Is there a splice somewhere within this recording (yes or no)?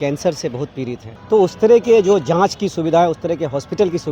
yes